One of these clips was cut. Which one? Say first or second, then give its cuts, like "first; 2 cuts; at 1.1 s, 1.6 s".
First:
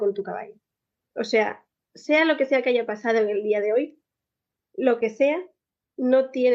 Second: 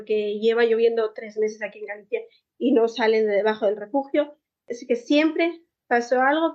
second; 1 cut; at 4.7 s